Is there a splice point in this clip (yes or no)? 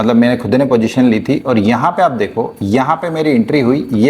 no